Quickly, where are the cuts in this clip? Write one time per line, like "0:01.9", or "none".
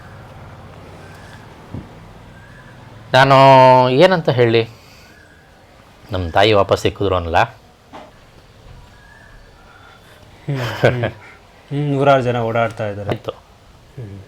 0:08.1
0:13.1